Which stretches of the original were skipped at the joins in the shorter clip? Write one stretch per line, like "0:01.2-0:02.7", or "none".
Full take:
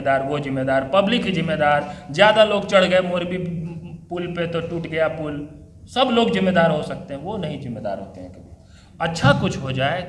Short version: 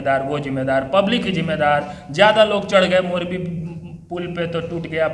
none